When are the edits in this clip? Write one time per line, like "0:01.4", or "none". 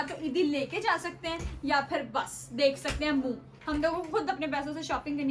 none